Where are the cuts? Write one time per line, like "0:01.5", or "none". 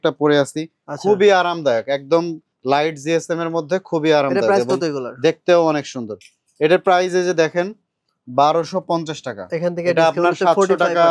none